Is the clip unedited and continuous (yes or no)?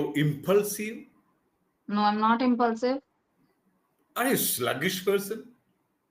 yes